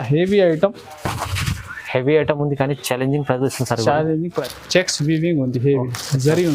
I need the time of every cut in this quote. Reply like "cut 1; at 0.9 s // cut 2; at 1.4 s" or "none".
cut 1; at 4.4 s